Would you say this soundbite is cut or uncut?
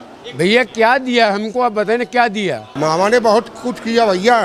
cut